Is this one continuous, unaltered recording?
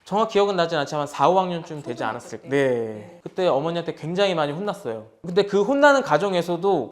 yes; 0 cuts

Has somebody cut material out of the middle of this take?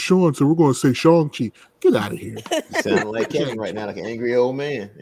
no; 0 cuts

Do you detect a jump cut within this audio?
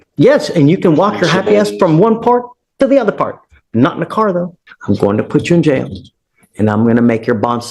yes; 1 cut; at 4.6 s

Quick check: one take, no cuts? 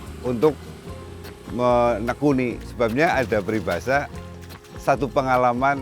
no; 1 cut; at 2.6 s

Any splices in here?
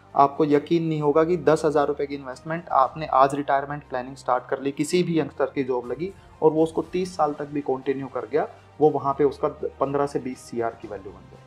no; 0 cuts

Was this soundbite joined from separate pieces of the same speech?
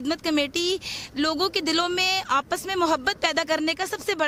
no; 0 cuts

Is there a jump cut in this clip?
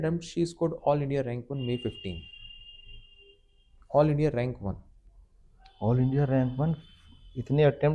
no; 0 cuts

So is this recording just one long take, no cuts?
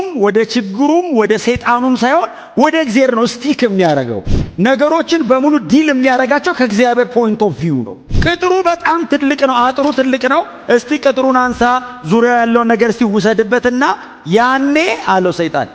no; 1 cut; at 8.0 s

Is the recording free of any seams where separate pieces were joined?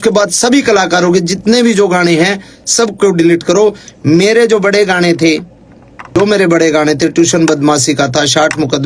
no; 1 cut; at 6.1 s

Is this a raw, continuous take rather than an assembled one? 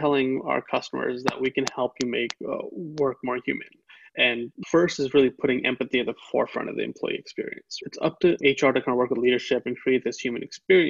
no; 2 cuts; at 4.5 s, 7.6 s

